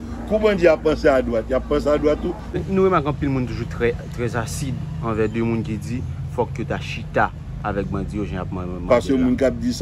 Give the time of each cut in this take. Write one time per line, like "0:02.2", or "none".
0:02.6